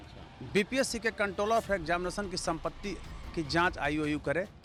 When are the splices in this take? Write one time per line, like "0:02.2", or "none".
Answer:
none